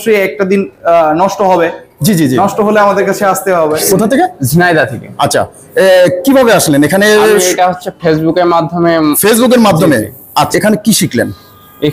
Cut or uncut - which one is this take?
cut